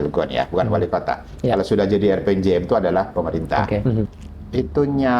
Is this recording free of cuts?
no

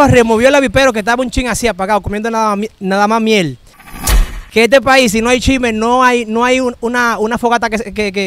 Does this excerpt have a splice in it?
yes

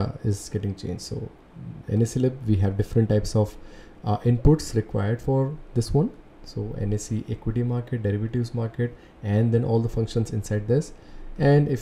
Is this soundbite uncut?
yes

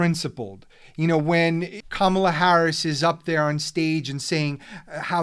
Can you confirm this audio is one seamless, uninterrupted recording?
no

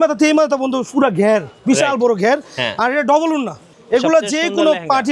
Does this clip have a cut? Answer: yes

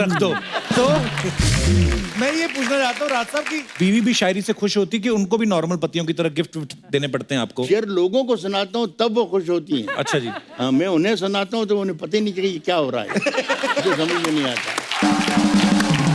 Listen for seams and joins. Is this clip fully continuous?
yes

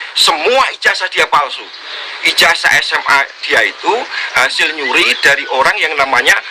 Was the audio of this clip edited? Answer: no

